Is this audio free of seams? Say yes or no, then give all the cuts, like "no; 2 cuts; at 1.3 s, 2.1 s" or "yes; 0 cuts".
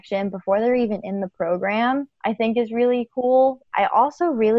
no; 2 cuts; at 2.1 s, 3.7 s